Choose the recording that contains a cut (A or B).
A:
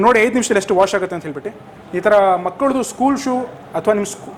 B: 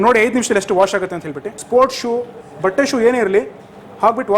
B